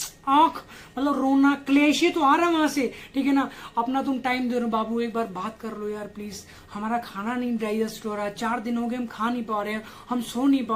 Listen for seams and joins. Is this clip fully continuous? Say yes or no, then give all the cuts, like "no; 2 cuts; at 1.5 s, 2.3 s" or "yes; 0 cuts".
yes; 0 cuts